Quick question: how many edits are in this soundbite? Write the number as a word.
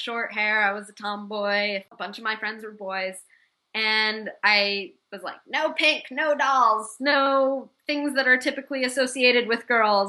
one